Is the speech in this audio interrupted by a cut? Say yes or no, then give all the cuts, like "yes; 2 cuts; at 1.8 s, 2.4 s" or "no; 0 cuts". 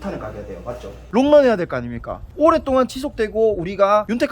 yes; 1 cut; at 1.0 s